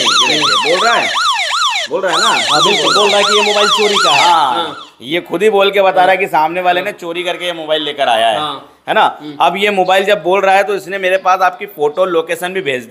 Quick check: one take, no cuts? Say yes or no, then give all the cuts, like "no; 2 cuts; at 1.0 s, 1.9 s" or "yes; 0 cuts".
yes; 0 cuts